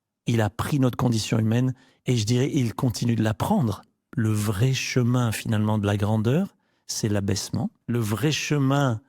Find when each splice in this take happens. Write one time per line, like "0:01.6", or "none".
0:04.0
0:07.8